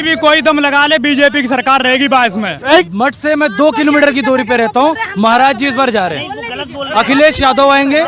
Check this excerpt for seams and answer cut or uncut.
cut